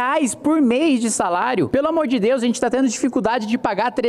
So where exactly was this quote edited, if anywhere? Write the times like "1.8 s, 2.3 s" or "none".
1.7 s

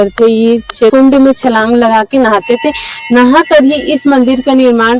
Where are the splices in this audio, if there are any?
0.9 s

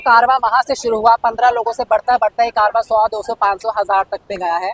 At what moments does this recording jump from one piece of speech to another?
none

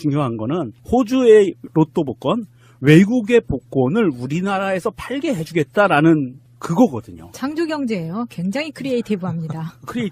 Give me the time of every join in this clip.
7.9 s

